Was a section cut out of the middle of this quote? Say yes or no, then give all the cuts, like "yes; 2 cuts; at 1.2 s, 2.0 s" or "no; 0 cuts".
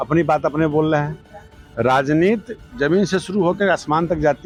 no; 0 cuts